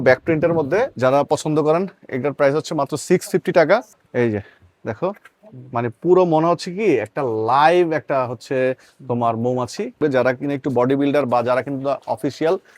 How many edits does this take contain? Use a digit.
3